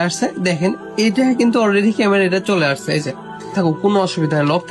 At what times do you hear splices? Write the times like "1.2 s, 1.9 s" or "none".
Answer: 3.5 s